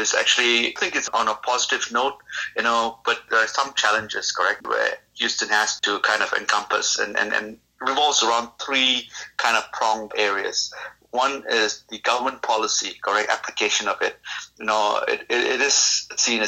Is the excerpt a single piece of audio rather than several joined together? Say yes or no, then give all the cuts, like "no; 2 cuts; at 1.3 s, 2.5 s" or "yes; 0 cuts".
no; 6 cuts; at 0.8 s, 3.3 s, 4.6 s, 5.8 s, 7.7 s, 10.1 s